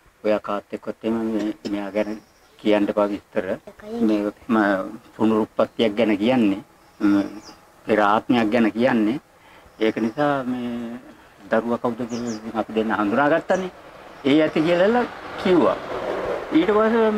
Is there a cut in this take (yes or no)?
no